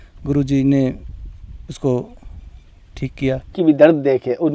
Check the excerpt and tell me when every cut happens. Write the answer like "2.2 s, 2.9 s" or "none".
3.6 s